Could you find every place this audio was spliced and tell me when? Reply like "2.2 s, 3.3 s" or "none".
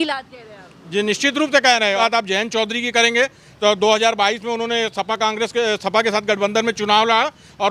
2.0 s